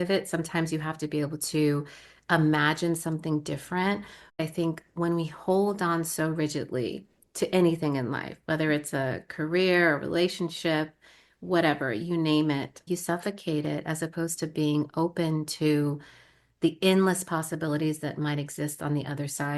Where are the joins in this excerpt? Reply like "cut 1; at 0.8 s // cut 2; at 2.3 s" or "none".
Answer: cut 1; at 4.4 s // cut 2; at 12.9 s